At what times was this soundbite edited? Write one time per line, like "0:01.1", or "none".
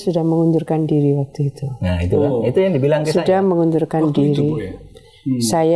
none